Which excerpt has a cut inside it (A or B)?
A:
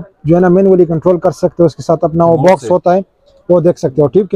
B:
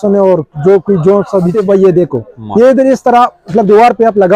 B